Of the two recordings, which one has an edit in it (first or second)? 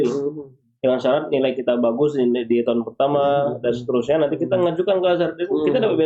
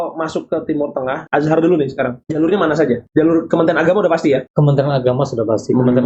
second